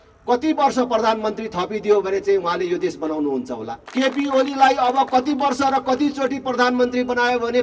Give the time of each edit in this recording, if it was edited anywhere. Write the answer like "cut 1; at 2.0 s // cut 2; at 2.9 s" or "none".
cut 1; at 3.8 s